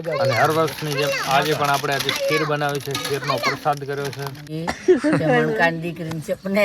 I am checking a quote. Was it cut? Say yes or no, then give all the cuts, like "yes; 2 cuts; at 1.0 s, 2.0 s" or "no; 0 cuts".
yes; 1 cut; at 4.4 s